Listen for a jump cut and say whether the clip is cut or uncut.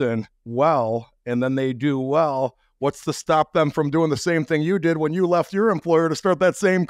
uncut